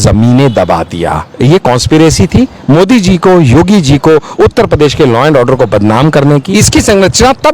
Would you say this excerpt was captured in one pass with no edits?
no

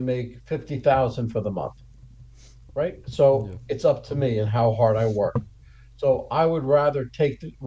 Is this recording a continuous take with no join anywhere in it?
yes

